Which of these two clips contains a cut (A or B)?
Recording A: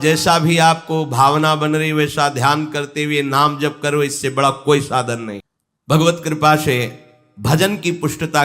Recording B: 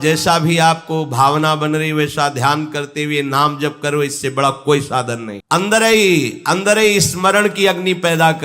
A